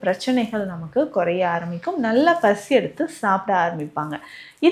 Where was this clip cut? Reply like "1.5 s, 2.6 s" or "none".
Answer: none